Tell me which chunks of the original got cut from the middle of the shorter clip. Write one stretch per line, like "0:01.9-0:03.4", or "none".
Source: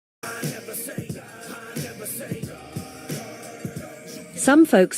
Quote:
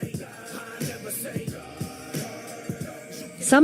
none